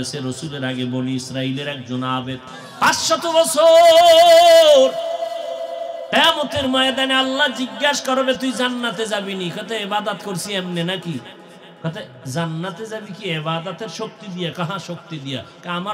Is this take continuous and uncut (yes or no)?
no